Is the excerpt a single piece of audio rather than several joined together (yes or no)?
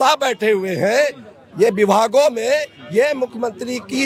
yes